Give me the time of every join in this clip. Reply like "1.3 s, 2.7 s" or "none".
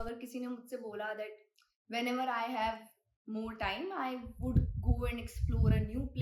none